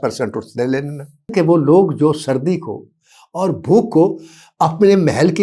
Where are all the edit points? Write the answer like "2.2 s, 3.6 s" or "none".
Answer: 1.3 s